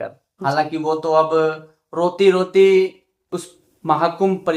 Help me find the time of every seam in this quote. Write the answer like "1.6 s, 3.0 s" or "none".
none